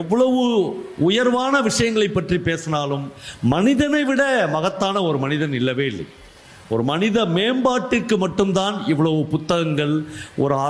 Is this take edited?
no; 0 cuts

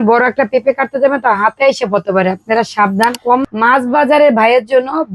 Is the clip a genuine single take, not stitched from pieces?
no; 1 cut; at 3.4 s

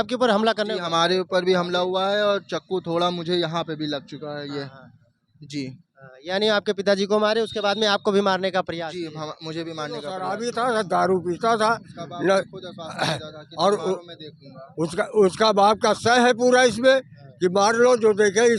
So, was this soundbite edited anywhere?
yes; 1 cut; at 10.2 s

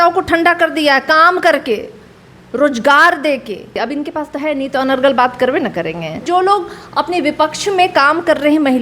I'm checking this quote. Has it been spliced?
yes; 2 cuts; at 3.7 s, 6.3 s

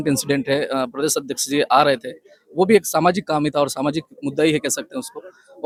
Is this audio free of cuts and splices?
yes; 0 cuts

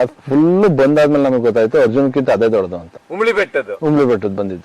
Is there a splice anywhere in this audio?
no; 0 cuts

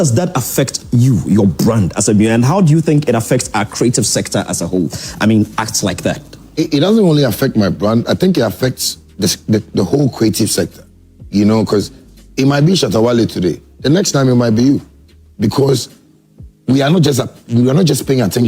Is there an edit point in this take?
no; 0 cuts

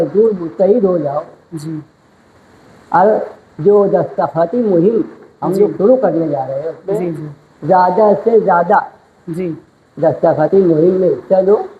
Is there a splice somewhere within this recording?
no; 0 cuts

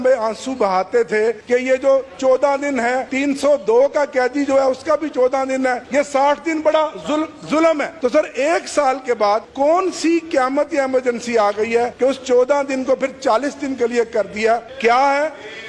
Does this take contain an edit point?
yes; 7 cuts; at 1.4 s, 3.1 s, 5.8 s, 7.9 s, 9.5 s, 11.9 s, 14.7 s

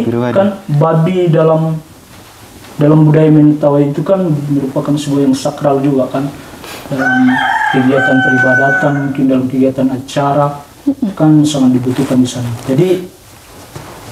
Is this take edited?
no; 0 cuts

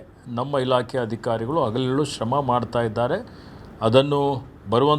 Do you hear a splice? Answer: no; 0 cuts

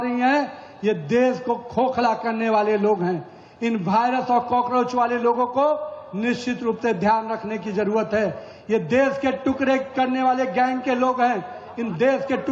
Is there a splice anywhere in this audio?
no; 0 cuts

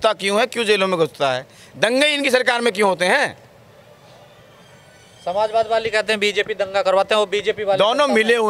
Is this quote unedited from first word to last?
yes; 0 cuts

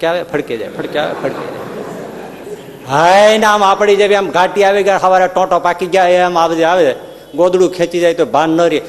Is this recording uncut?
yes; 0 cuts

